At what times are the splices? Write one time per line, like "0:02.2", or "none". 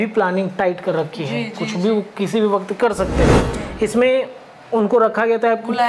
0:03.5